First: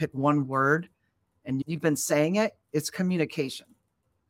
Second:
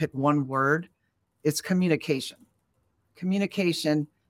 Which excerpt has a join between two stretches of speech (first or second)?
second